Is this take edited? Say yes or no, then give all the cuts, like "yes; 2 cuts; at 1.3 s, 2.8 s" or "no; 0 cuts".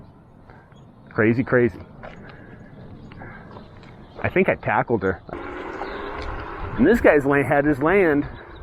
yes; 1 cut; at 5.3 s